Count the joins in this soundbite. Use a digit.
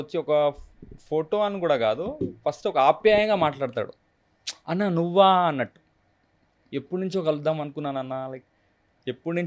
0